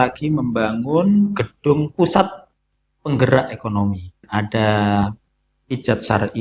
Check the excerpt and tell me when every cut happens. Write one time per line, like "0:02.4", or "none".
0:04.2